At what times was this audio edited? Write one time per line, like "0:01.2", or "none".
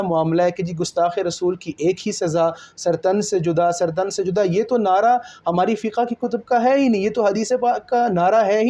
none